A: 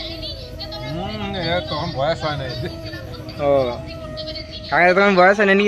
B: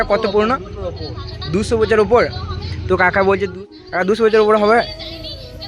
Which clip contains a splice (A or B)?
B